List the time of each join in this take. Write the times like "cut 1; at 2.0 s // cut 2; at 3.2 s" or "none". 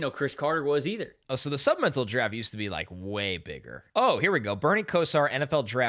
cut 1; at 1.1 s // cut 2; at 3.8 s